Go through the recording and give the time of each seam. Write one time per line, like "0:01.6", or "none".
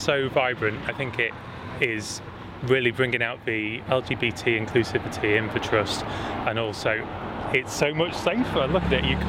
0:00.9
0:03.8